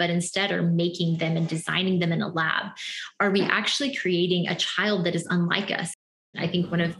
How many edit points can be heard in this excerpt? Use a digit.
1